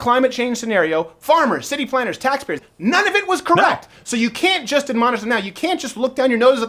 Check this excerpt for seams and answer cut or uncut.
cut